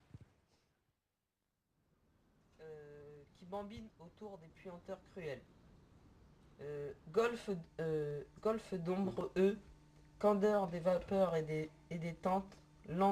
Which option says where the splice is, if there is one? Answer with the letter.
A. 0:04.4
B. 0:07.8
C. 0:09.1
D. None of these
A